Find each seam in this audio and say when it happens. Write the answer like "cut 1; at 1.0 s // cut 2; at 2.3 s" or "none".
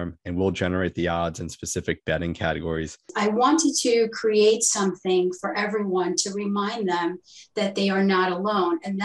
cut 1; at 3.1 s